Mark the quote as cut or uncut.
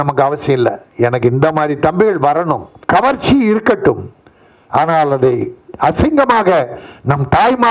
cut